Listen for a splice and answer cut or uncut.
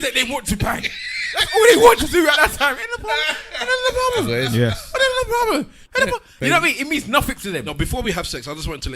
cut